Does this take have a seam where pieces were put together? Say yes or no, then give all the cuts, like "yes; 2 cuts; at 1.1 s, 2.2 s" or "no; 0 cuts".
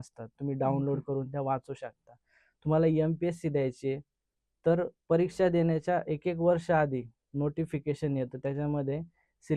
no; 0 cuts